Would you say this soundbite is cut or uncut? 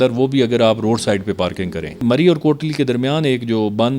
cut